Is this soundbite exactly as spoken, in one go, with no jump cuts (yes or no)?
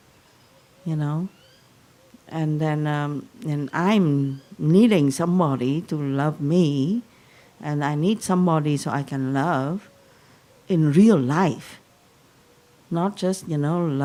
yes